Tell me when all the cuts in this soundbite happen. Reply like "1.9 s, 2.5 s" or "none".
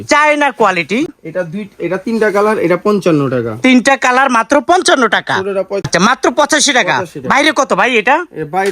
1.1 s, 5.9 s